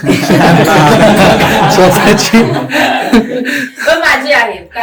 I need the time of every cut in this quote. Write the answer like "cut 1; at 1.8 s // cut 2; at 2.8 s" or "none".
none